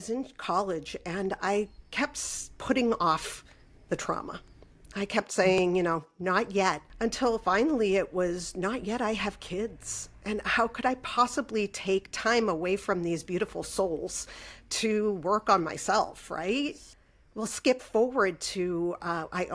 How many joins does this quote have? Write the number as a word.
two